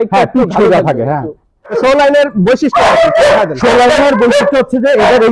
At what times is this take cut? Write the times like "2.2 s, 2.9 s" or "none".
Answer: 1.7 s